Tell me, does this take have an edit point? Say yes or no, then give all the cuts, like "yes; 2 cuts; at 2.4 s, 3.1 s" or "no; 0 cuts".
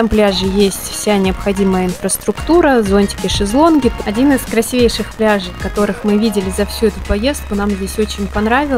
yes; 1 cut; at 4.0 s